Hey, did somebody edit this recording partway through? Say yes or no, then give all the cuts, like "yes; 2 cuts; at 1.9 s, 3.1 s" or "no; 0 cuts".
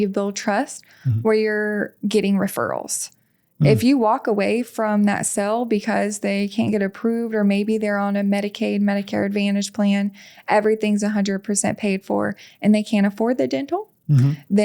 no; 0 cuts